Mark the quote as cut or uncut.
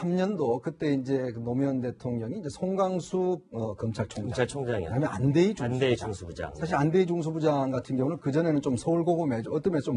cut